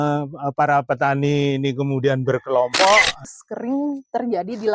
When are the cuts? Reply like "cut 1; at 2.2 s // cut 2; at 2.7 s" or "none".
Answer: cut 1; at 3.4 s